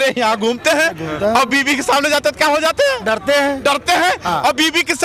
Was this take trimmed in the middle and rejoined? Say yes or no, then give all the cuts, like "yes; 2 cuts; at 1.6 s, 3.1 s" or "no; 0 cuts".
no; 0 cuts